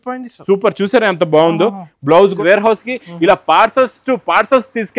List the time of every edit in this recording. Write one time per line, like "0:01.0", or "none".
0:02.3